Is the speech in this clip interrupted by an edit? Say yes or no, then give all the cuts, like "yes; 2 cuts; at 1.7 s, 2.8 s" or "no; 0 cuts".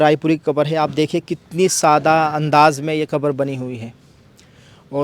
no; 0 cuts